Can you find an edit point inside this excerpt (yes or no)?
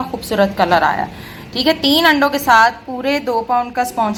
no